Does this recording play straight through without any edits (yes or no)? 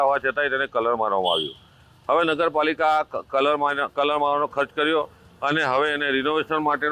yes